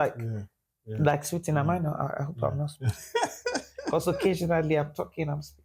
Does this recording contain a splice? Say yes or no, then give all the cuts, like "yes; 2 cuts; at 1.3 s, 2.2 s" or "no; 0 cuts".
no; 0 cuts